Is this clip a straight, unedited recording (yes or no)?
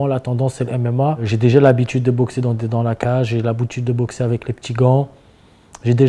no